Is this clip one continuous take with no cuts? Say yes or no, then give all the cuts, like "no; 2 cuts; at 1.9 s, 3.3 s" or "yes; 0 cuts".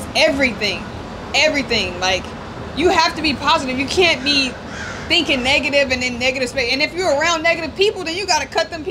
yes; 0 cuts